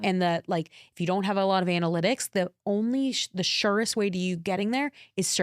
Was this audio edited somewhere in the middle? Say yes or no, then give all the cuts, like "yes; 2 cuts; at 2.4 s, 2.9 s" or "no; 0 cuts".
no; 0 cuts